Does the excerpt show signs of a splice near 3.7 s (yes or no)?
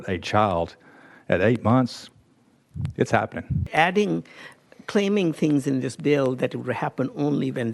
yes